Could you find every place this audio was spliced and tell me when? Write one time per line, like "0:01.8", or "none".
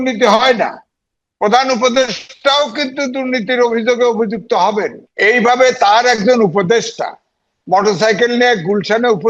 0:05.0